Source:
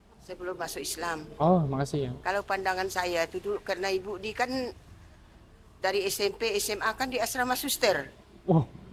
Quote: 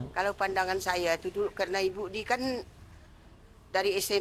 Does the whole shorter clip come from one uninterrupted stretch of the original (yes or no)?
yes